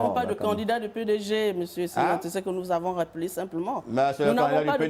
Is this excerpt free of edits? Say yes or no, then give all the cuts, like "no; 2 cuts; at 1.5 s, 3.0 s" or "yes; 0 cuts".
yes; 0 cuts